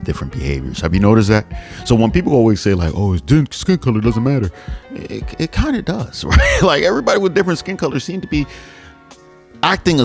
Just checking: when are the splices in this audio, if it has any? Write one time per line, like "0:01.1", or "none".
none